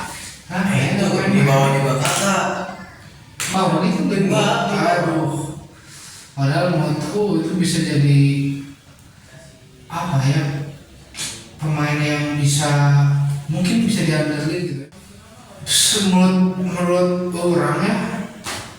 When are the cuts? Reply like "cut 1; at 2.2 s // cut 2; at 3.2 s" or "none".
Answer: cut 1; at 14.8 s